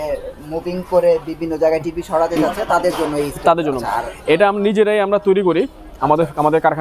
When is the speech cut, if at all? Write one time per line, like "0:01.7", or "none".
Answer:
0:03.8